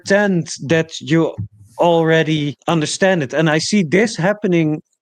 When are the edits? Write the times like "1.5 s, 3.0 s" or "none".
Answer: 2.6 s